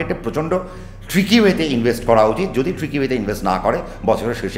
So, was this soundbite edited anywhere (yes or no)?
no